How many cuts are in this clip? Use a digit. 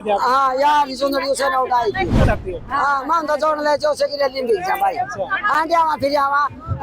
1